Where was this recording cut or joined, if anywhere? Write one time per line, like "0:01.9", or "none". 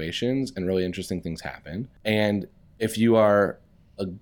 0:01.9